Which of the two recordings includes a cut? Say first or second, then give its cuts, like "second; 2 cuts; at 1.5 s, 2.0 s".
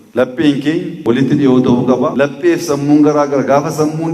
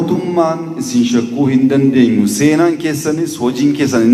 first; 2 cuts; at 0.9 s, 2.1 s